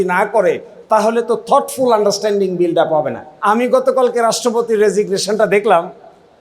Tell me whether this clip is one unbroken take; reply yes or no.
no